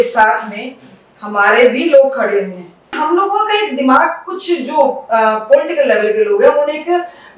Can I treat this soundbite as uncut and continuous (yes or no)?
no